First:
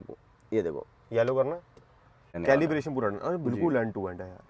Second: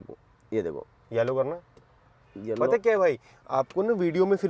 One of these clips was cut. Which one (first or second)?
first